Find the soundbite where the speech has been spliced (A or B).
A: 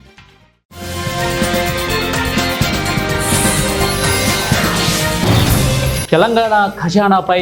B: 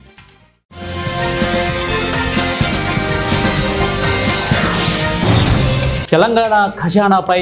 B